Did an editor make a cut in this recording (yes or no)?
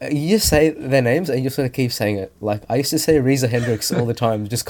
no